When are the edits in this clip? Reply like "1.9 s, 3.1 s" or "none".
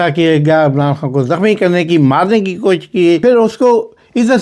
none